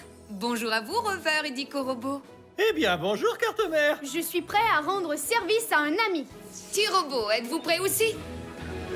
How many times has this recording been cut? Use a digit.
1